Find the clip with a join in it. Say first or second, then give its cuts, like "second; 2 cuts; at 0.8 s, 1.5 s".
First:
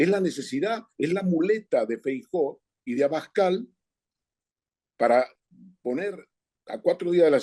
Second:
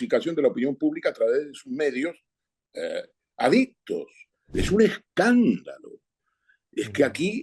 second; 1 cut; at 4.5 s